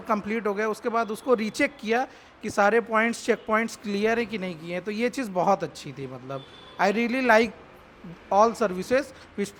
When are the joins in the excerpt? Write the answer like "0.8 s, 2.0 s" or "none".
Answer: none